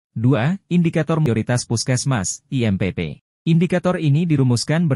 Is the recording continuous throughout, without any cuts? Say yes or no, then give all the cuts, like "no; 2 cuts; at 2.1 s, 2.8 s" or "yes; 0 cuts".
no; 2 cuts; at 1.3 s, 3.2 s